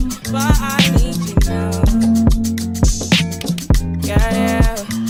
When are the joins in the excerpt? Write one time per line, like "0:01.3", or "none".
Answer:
none